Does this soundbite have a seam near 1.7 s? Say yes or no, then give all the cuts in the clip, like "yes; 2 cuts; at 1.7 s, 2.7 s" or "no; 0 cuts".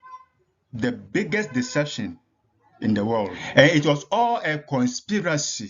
no; 1 cut; at 3.4 s